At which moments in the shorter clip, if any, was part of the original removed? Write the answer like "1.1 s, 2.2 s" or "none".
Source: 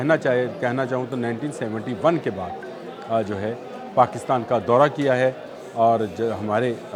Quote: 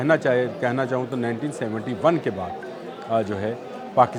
none